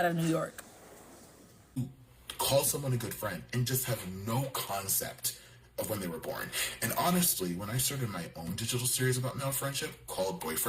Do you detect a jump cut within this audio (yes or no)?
yes